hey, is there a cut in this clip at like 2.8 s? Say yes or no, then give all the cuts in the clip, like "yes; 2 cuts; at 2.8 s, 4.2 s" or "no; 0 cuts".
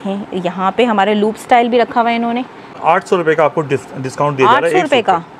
yes; 1 cut; at 2.8 s